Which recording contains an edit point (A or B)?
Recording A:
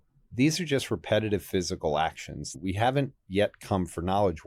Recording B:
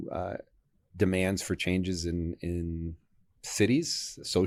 A